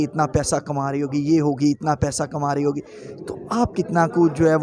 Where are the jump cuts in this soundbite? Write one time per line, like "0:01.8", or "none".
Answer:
none